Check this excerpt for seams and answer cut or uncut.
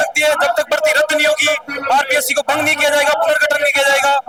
uncut